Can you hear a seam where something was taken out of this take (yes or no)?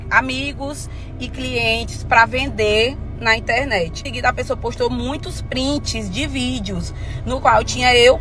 yes